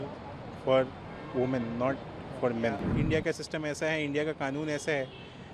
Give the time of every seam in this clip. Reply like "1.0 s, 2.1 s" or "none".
2.9 s